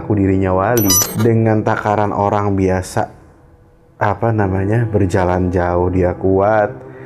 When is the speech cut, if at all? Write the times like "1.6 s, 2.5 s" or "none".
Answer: 1.0 s